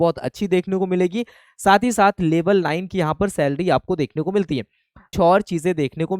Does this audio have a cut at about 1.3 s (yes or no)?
no